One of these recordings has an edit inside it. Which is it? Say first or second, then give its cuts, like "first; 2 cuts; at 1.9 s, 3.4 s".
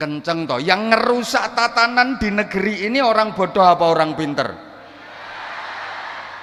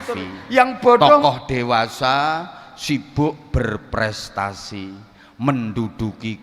second; 1 cut; at 1.2 s